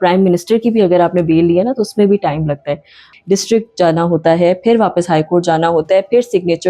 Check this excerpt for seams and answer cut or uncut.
cut